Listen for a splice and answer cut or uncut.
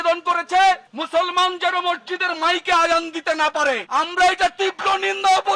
uncut